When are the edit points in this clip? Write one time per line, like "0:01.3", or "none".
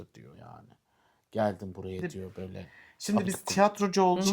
0:03.2